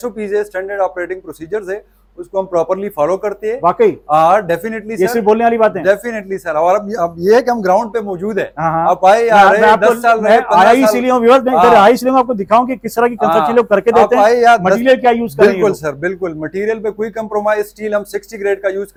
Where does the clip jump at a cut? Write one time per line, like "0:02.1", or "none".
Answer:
none